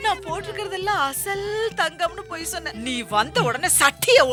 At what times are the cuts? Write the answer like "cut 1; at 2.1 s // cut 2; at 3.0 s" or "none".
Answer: none